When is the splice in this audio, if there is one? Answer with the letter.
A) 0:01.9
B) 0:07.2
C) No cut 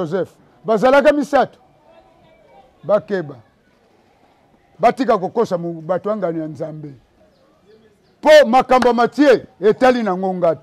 B